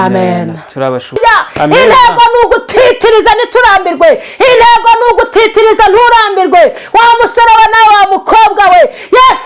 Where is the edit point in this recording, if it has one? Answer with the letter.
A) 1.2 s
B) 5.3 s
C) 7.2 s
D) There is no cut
A